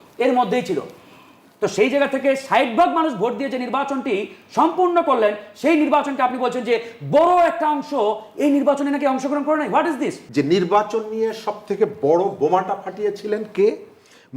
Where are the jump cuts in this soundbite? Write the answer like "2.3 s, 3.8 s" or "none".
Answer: 10.2 s